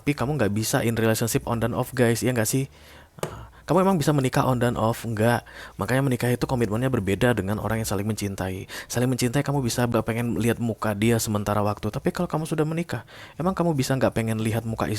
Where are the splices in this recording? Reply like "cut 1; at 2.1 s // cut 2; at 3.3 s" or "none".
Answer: cut 1; at 9.9 s